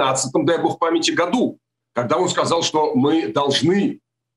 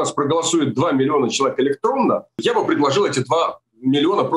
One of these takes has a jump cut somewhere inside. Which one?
second; 1 cut; at 2.4 s

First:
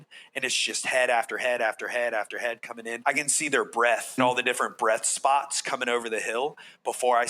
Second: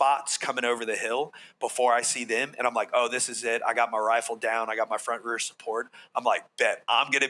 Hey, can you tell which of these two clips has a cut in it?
first; 2 cuts; at 2.9 s, 4.2 s

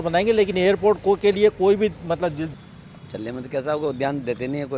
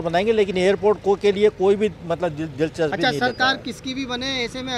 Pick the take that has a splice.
first; 1 cut; at 2.5 s

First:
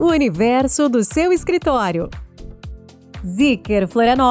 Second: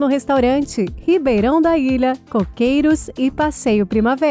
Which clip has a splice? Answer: first; 1 cut; at 2.8 s

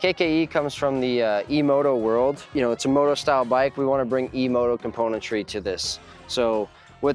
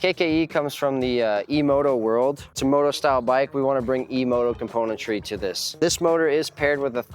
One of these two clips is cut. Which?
second; 2 cuts; at 2.5 s, 5.7 s

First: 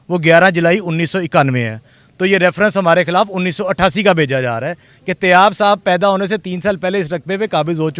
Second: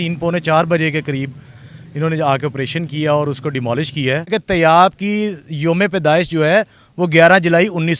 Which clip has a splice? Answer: second; 1 cut; at 4.3 s

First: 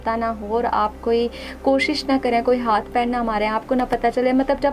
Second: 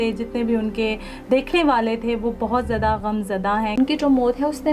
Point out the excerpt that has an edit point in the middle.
second; 1 cut; at 3.7 s

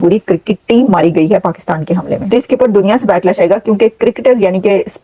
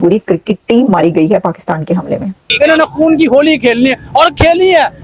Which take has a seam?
second; 1 cut; at 2.3 s

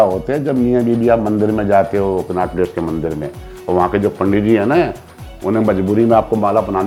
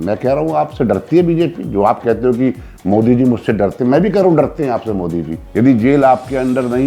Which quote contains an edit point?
second; 1 cut; at 5.4 s

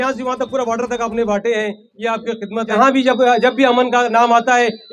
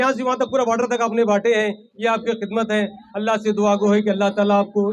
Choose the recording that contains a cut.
first; 1 cut; at 2.7 s

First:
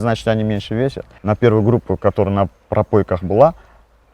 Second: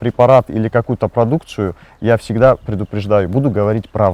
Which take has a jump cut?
first; 1 cut; at 1.1 s

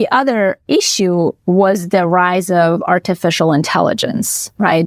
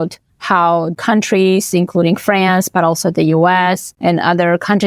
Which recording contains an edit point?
second; 2 cuts; at 0.9 s, 3.9 s

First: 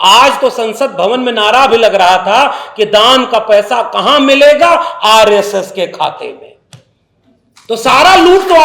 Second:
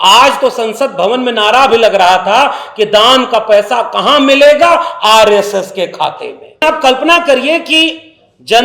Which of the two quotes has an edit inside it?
second; 1 cut; at 6.6 s

